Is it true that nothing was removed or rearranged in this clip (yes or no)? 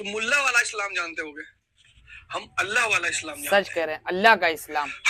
yes